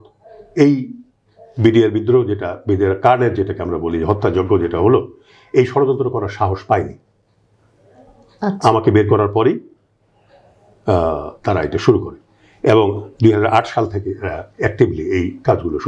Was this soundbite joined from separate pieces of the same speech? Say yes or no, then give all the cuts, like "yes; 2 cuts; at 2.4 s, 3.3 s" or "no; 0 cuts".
no; 0 cuts